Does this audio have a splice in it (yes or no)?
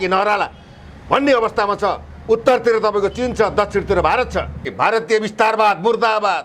yes